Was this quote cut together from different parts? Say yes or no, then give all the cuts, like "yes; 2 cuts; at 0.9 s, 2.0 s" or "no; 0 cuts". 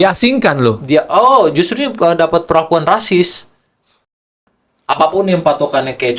yes; 1 cut; at 4.1 s